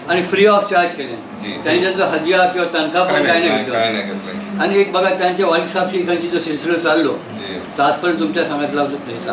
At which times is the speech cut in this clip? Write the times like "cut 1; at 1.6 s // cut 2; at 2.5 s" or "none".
none